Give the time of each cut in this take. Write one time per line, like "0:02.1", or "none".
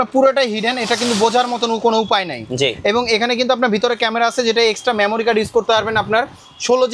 none